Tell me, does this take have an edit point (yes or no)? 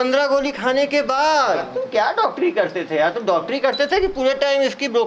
yes